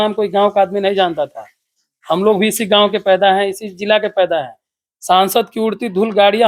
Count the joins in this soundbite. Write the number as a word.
zero